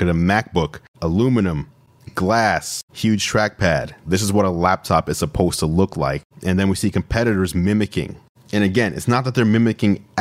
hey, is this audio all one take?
yes; 0 cuts

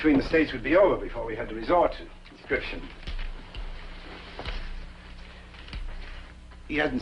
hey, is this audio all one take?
yes; 0 cuts

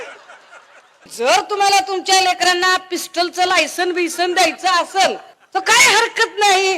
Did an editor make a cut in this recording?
yes; 2 cuts; at 1.1 s, 5.3 s

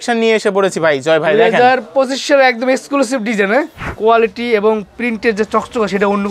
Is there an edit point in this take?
yes; 1 cut; at 3.8 s

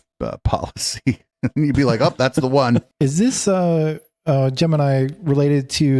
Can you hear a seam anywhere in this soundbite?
yes; 1 cut; at 2.9 s

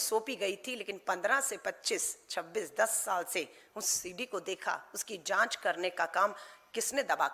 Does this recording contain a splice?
no; 0 cuts

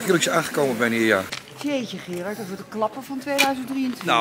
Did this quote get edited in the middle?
yes; 1 cut; at 1.3 s

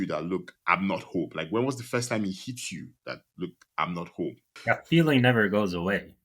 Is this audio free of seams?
no; 1 cut; at 4.5 s

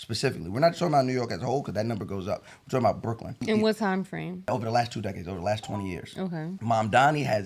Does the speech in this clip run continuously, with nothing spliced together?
no; 3 cuts; at 3.4 s, 4.5 s, 6.6 s

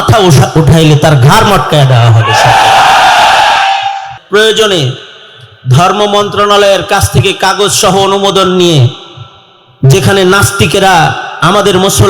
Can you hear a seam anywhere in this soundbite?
yes; 1 cut; at 4.1 s

